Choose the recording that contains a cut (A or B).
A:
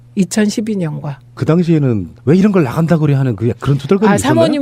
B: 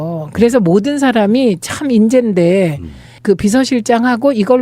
B